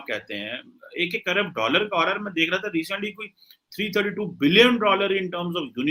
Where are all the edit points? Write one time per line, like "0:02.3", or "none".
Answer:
none